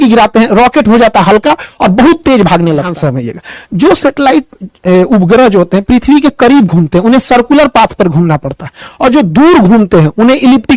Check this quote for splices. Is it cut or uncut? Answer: cut